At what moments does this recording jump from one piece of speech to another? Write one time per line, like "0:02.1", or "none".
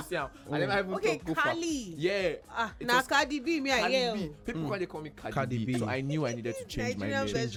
none